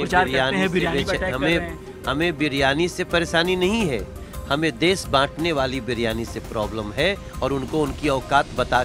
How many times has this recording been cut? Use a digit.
0